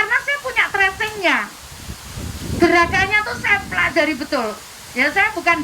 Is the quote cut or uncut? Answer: uncut